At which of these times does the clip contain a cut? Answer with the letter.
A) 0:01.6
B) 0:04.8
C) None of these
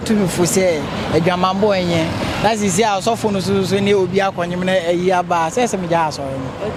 C